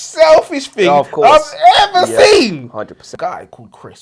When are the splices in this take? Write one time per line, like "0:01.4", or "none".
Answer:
0:03.0

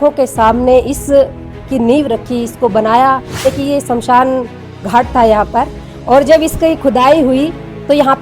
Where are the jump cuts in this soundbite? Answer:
0:03.4

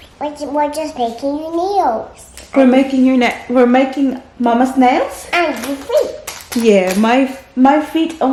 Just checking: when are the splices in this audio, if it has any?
none

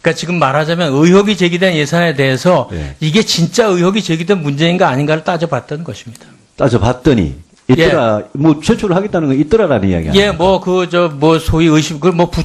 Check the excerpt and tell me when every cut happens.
0:07.6

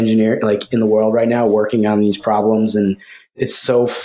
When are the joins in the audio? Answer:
none

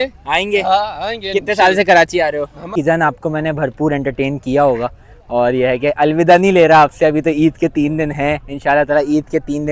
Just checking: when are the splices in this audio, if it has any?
0:02.7

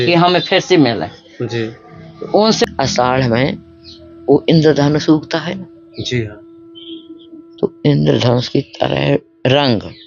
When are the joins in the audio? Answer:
0:02.6

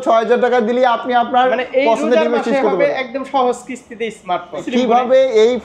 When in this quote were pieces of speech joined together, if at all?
0:04.7

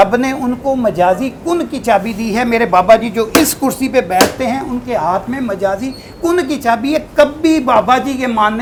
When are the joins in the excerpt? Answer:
none

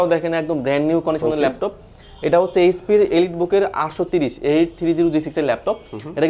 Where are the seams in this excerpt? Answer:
none

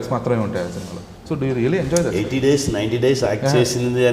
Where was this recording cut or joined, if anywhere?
none

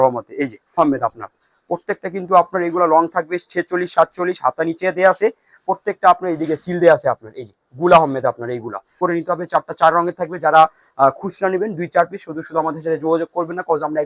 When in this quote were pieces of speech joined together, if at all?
0:00.8
0:09.0

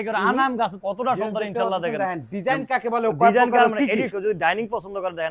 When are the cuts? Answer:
0:00.8
0:04.1

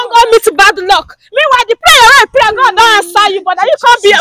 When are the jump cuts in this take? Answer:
none

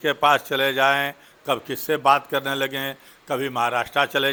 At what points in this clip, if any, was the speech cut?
none

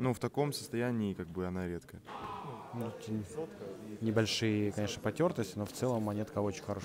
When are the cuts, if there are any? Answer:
0:02.0

